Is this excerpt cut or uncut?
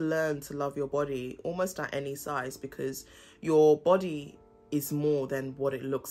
uncut